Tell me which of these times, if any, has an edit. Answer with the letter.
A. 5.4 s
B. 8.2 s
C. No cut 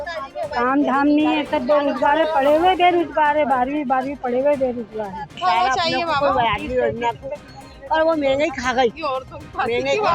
A